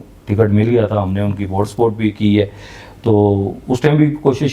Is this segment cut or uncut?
uncut